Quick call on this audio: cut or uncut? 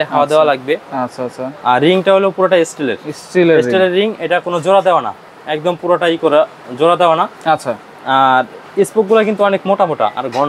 uncut